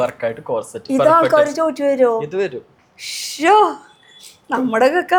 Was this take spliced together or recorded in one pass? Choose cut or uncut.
uncut